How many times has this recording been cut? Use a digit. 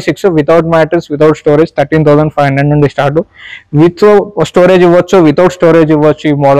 0